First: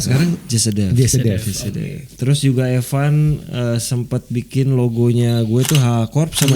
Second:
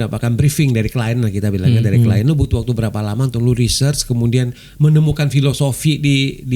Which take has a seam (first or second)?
first